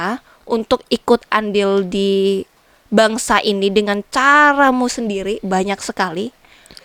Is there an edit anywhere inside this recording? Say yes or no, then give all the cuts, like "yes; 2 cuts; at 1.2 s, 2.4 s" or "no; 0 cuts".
no; 0 cuts